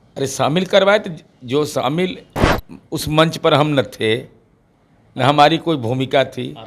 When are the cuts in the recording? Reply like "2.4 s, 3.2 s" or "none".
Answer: none